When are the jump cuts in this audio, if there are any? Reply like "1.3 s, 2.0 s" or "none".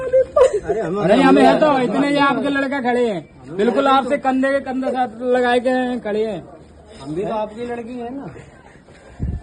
none